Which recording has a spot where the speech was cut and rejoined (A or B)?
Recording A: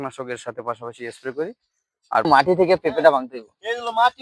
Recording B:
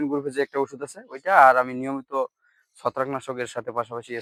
A